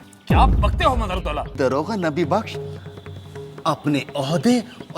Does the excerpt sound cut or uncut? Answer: cut